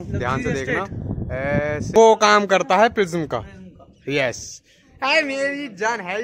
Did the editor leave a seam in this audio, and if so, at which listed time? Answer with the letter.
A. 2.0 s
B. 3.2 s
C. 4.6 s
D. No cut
A